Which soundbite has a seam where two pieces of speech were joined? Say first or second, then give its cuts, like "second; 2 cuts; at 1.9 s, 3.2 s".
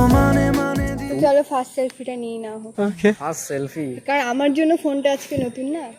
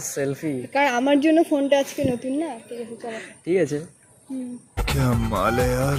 first; 1 cut; at 1.0 s